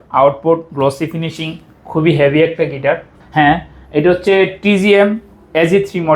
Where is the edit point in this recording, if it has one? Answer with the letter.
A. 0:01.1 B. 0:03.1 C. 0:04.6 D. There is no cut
B